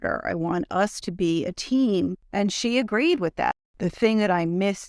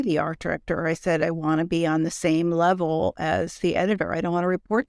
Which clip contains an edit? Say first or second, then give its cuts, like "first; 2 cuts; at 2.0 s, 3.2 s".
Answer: first; 2 cuts; at 2.2 s, 3.6 s